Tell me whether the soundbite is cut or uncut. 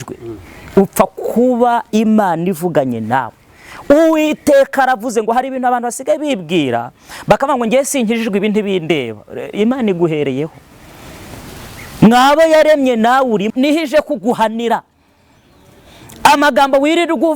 cut